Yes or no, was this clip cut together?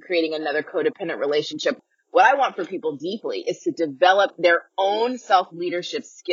yes